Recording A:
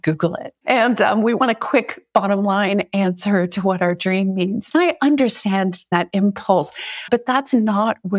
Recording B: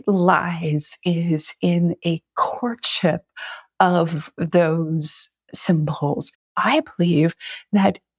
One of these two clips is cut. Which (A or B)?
B